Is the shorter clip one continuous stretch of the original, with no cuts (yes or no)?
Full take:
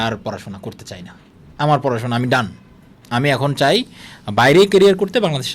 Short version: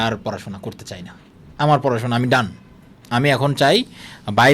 yes